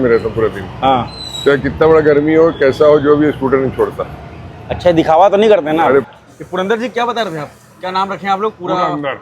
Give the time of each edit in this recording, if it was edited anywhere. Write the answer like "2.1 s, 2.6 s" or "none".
6.1 s